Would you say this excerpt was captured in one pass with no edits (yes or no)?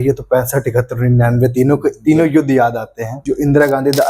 no